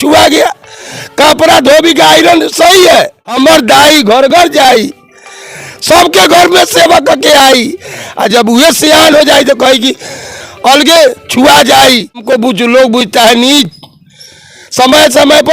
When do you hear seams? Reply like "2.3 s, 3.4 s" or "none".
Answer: 3.2 s, 12.2 s